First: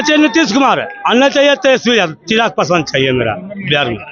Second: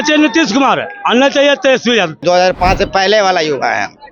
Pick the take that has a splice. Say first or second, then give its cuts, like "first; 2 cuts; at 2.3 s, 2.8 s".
second; 1 cut; at 2.2 s